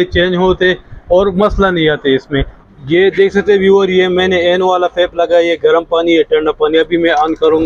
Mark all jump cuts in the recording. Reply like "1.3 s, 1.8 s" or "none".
2.6 s